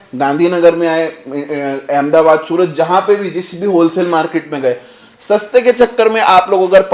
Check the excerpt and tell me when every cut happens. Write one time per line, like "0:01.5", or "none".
none